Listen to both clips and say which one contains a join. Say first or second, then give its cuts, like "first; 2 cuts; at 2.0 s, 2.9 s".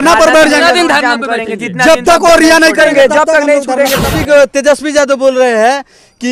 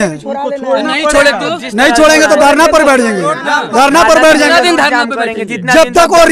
first; 1 cut; at 4.1 s